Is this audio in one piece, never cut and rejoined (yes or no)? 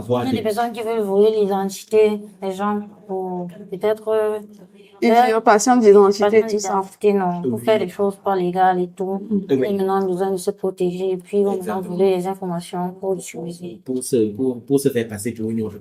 yes